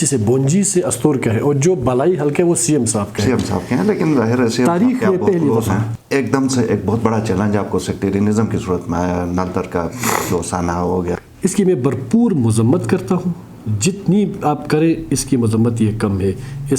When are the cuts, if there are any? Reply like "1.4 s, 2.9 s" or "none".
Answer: 5.9 s, 11.2 s